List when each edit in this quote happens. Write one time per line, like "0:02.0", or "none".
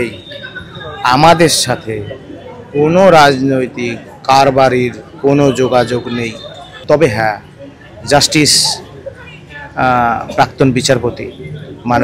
0:06.7